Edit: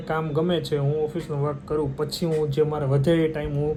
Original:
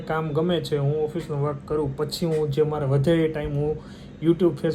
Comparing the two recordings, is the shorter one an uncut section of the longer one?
yes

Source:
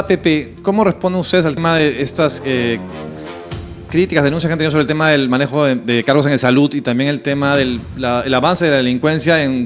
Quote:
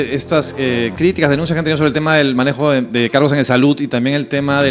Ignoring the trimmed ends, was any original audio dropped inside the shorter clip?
yes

